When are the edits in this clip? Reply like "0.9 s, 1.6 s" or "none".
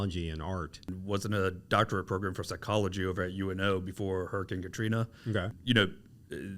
0.9 s, 5.5 s